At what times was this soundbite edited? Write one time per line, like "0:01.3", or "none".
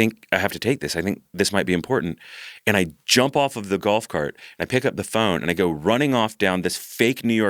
none